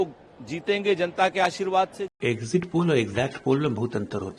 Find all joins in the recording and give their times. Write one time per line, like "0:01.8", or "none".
0:02.0